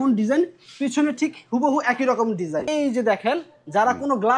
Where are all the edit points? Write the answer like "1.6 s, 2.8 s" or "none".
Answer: 2.7 s